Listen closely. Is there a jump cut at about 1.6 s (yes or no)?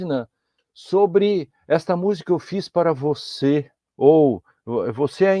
no